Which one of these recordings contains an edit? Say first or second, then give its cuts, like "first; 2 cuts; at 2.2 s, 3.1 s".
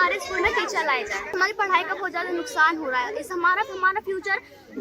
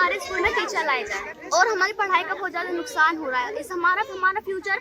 first; 1 cut; at 1.4 s